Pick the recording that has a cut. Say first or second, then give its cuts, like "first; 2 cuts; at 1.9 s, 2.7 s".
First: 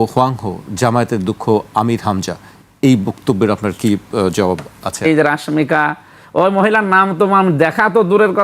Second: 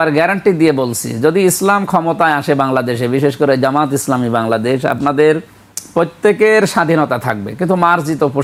first; 1 cut; at 5.0 s